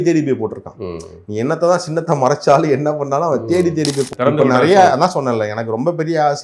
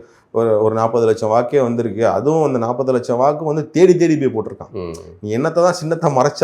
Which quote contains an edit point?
first; 1 cut; at 4.1 s

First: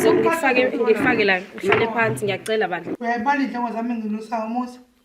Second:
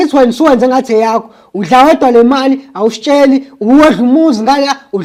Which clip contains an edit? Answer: first; 1 cut; at 2.9 s

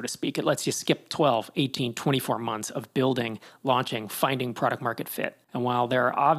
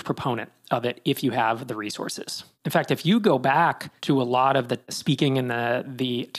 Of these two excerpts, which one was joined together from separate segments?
second; 2 cuts; at 3.9 s, 5.0 s

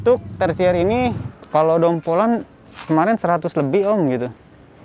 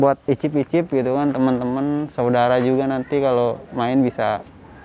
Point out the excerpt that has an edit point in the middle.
first; 1 cut; at 1.2 s

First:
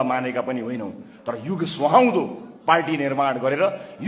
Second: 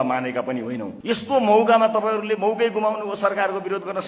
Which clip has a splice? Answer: second; 1 cut; at 0.9 s

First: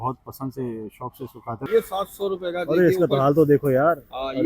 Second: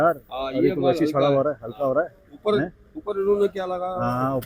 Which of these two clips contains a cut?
first; 1 cut; at 1.6 s

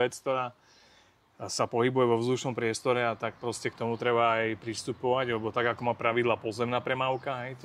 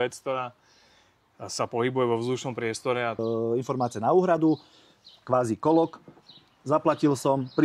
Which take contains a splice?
second; 1 cut; at 3.2 s

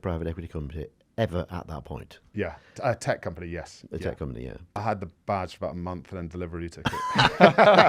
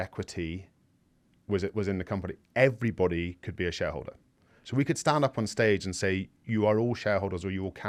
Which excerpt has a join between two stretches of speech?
first; 2 cuts; at 1.0 s, 4.7 s

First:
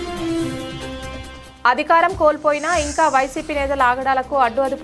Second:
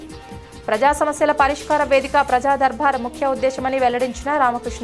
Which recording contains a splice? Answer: first; 1 cut; at 1.0 s

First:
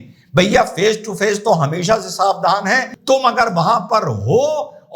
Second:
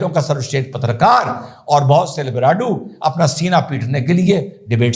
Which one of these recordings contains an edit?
first; 1 cut; at 2.9 s

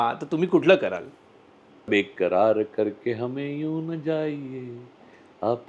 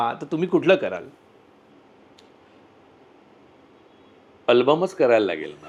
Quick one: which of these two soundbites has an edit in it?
first; 1 cut; at 1.9 s

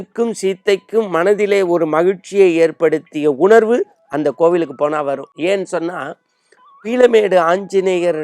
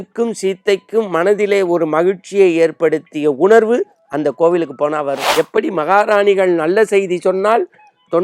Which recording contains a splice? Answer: second; 1 cut; at 5.2 s

